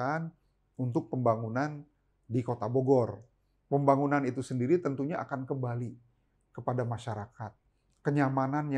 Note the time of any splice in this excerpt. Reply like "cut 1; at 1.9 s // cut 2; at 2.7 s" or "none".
none